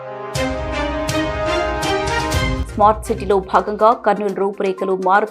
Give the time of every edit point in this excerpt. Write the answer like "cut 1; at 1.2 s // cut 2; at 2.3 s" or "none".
cut 1; at 2.6 s